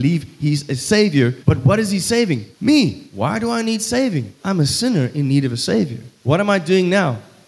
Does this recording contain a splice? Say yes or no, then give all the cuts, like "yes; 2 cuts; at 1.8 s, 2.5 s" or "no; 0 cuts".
yes; 5 cuts; at 1.4 s, 2.5 s, 3.0 s, 4.3 s, 6.1 s